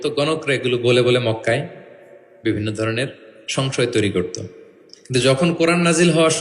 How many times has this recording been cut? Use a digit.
0